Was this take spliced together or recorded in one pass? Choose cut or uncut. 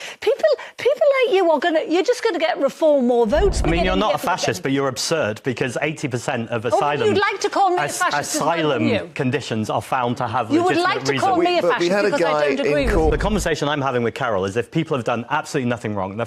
cut